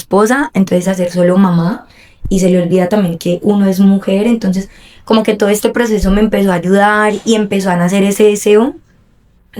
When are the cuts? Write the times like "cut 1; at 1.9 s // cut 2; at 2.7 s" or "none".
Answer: none